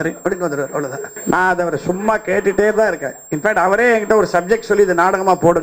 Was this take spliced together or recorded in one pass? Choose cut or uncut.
cut